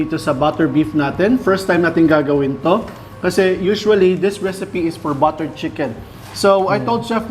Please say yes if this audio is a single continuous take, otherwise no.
yes